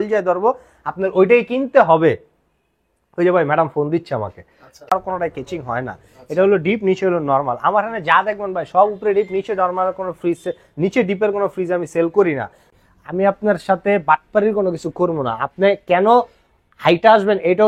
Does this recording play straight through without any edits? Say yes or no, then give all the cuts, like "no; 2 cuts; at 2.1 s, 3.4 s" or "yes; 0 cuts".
no; 2 cuts; at 4.9 s, 12.7 s